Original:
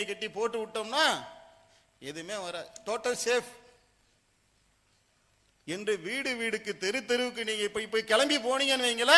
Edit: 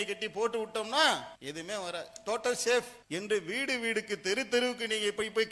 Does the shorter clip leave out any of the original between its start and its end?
yes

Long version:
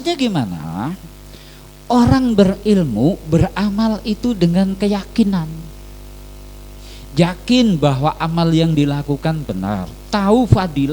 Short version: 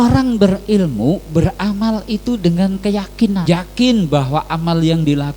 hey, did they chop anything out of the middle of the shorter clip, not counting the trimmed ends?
yes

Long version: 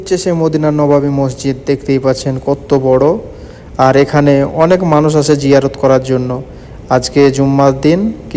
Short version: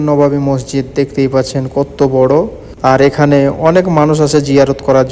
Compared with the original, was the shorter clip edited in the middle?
yes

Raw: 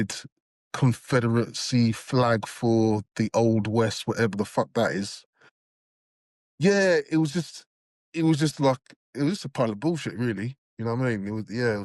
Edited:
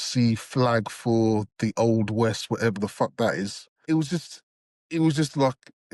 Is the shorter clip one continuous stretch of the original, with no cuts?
no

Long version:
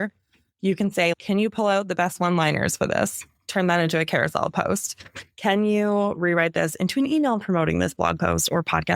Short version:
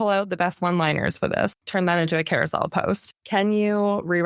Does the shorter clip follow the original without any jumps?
no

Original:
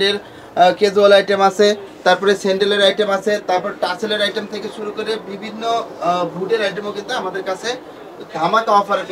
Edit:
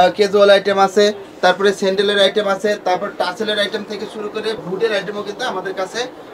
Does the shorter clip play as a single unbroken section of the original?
no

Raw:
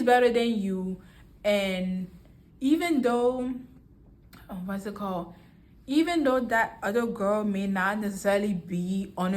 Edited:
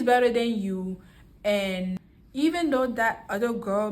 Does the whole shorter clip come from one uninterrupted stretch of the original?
no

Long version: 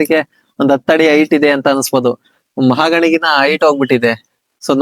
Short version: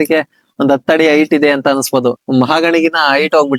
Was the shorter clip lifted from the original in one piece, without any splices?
no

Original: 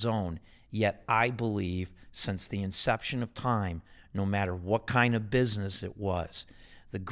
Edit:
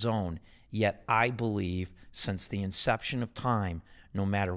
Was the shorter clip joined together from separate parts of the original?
no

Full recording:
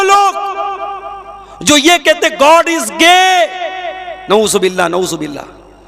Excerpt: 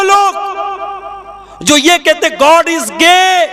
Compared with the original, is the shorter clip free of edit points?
yes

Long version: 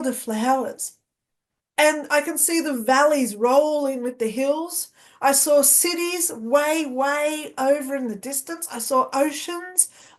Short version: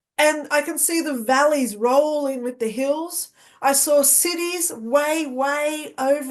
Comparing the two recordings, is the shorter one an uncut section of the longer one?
yes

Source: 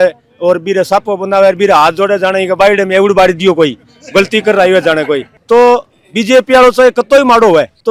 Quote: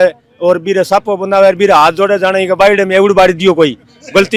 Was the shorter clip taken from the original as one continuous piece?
yes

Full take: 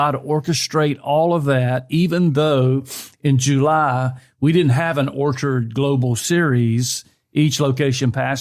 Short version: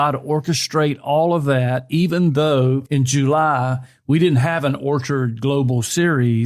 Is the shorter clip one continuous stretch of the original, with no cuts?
no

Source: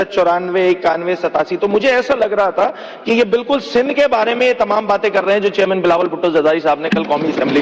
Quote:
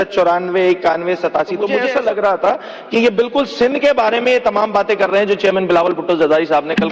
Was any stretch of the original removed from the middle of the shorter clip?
yes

